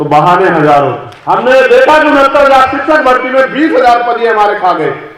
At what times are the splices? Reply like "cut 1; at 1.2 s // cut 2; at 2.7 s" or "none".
cut 1; at 1.1 s